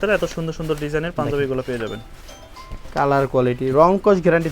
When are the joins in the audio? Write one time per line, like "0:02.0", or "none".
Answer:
none

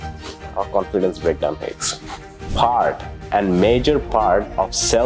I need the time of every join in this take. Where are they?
0:02.4

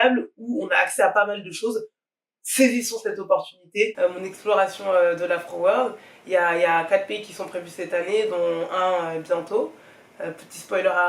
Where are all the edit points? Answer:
0:03.9

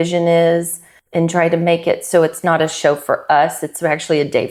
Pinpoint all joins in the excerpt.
none

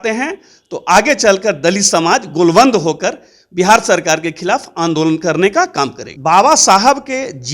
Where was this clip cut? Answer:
0:06.0

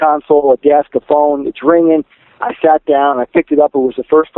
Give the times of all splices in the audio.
none

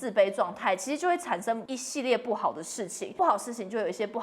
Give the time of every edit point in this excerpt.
0:01.7
0:03.1

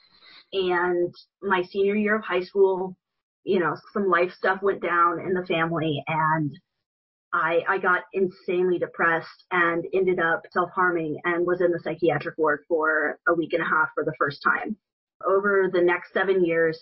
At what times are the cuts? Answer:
0:03.8

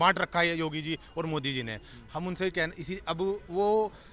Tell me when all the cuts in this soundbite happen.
none

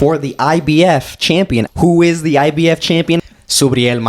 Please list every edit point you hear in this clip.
0:01.7
0:03.2

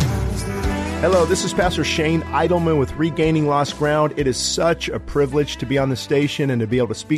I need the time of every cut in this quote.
none

